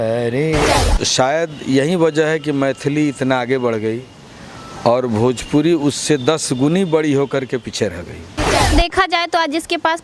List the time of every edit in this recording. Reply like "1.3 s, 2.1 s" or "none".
0.8 s, 8.6 s